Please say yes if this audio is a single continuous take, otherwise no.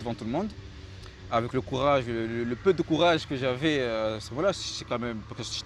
yes